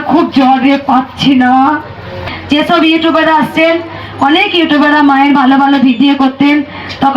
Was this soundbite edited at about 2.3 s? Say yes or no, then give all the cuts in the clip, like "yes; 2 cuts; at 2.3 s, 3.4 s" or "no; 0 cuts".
yes; 1 cut; at 2.3 s